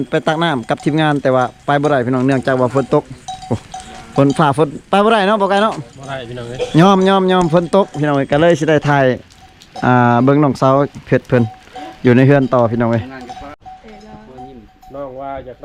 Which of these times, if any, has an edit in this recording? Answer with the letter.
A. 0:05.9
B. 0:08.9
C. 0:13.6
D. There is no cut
C